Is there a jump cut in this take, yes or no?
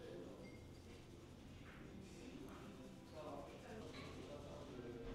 yes